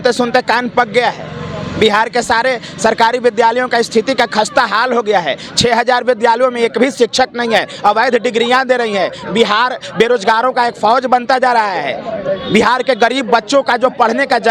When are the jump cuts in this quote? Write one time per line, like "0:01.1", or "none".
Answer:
none